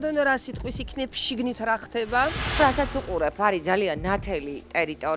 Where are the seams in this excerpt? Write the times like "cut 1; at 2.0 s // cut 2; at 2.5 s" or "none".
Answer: none